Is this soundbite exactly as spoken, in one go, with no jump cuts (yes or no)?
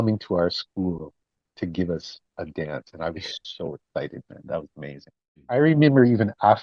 no